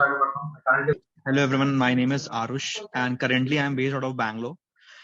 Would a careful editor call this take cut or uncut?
cut